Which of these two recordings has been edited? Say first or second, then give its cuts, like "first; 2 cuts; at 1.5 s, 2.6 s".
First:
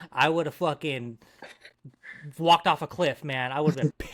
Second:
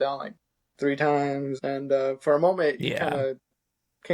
second; 1 cut; at 1.6 s